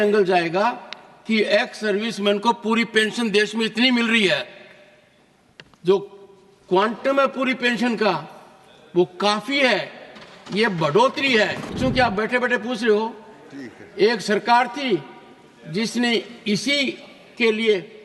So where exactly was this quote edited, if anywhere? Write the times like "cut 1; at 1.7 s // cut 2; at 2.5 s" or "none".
cut 1; at 11.7 s